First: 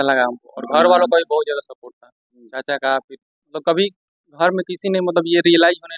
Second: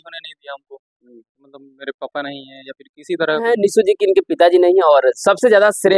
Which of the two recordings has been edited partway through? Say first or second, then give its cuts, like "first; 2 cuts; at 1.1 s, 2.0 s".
second; 1 cut; at 3.5 s